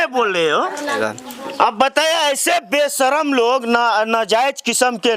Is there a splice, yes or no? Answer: yes